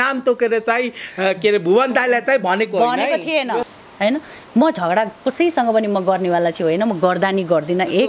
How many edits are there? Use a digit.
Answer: 1